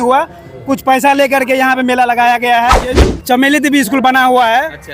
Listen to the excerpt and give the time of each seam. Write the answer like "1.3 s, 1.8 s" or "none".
3.1 s

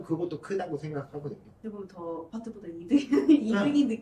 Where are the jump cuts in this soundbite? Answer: 1.5 s, 2.3 s

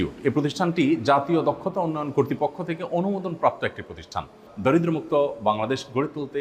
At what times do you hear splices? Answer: 4.4 s

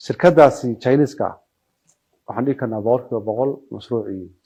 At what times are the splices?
none

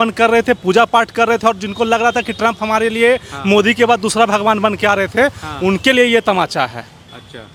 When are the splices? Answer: none

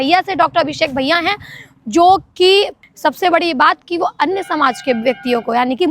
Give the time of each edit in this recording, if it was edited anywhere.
2.8 s

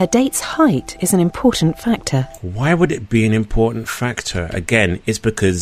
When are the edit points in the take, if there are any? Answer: none

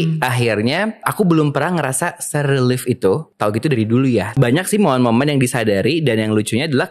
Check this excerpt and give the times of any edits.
1.1 s, 3.3 s, 4.3 s

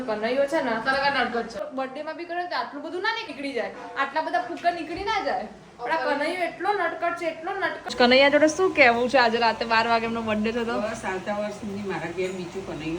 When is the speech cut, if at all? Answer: 1.6 s, 3.3 s, 7.9 s

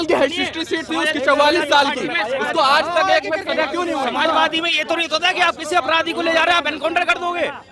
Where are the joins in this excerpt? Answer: none

